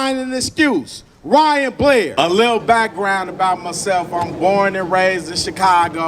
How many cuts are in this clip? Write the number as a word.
one